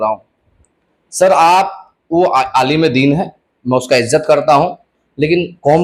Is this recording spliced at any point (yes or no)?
no